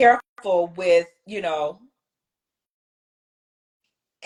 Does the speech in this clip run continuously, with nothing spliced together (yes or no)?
yes